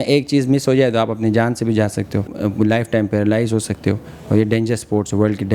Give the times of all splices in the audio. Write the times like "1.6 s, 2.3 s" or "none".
2.3 s